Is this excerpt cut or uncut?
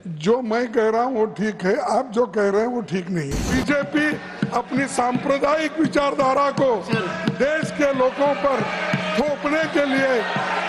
cut